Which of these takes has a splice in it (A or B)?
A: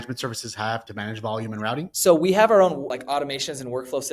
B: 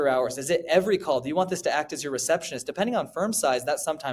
A